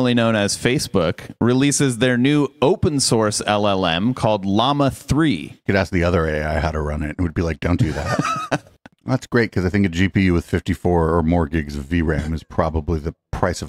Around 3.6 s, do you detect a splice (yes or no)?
no